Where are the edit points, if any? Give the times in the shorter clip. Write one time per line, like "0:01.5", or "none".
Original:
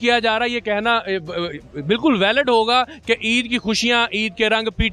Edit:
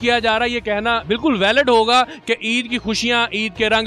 0:01.0